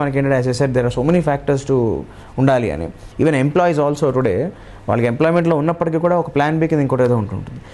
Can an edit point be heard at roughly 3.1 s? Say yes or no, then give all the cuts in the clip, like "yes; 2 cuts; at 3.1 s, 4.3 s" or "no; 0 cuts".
yes; 1 cut; at 3.1 s